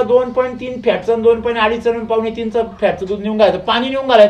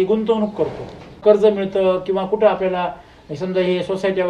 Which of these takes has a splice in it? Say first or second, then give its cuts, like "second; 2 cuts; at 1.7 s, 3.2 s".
second; 1 cut; at 1.2 s